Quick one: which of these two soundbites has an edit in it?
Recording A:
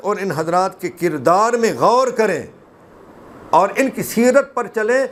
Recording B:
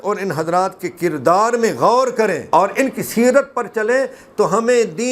B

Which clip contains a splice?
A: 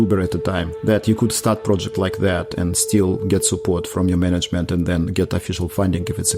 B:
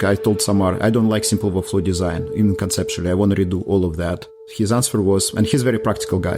B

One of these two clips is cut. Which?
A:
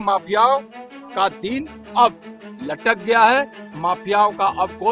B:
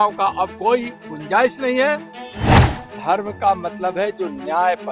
B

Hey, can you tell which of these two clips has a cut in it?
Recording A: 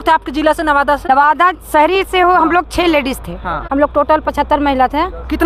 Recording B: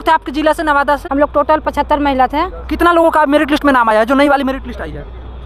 B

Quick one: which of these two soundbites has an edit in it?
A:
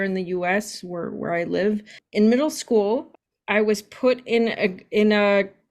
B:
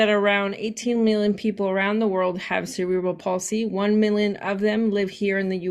A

